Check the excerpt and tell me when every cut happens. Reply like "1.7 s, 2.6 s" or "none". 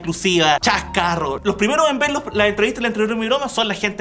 1.2 s

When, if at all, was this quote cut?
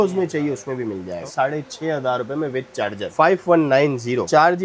1.3 s, 3.1 s

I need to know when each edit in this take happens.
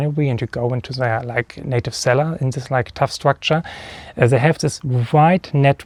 none

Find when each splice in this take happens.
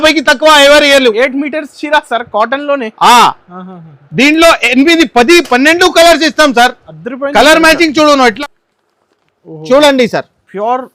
8.4 s

